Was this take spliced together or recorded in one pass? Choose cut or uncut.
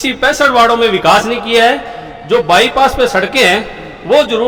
uncut